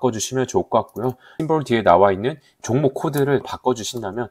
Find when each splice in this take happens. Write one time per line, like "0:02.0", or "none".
0:01.3
0:02.5
0:03.4